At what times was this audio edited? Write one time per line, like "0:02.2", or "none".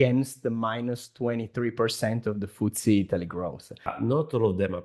0:03.9